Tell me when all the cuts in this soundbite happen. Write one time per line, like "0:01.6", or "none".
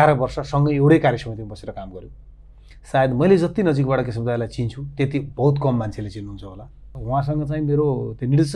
0:07.0